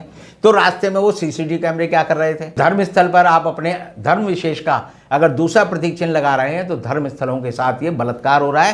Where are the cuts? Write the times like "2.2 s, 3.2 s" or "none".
2.6 s